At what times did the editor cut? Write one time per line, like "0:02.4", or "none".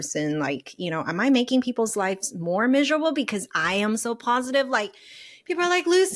none